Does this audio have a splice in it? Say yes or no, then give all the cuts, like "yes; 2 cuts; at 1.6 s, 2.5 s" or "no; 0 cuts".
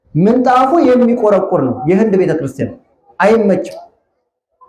no; 0 cuts